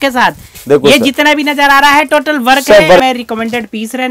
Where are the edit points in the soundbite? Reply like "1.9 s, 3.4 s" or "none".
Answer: 3.0 s